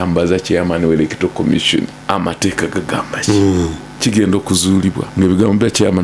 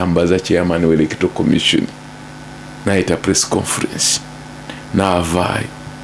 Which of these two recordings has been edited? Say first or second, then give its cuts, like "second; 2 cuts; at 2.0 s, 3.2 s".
first; 3 cuts; at 2.0 s, 3.8 s, 5.0 s